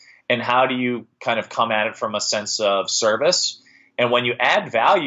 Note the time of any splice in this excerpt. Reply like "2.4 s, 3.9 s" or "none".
none